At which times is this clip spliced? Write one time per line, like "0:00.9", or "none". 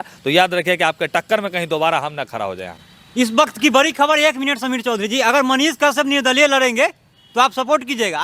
none